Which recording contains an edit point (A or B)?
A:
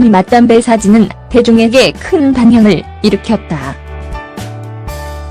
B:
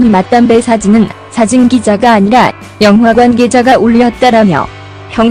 A